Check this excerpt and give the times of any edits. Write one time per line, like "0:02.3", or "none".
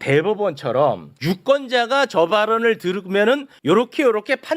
0:01.1
0:03.5